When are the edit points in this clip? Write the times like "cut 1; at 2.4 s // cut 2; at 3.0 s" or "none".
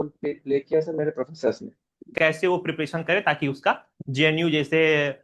cut 1; at 2.1 s